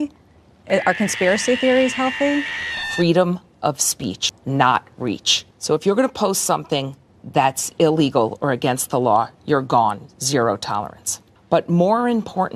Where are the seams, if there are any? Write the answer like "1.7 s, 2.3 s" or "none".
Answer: 2.8 s